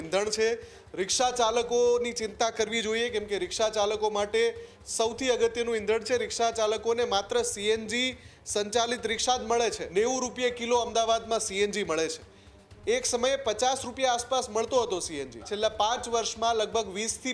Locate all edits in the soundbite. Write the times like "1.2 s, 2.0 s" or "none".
9.8 s, 15.5 s